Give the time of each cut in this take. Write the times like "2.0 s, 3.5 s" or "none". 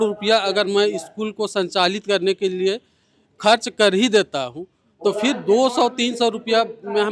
none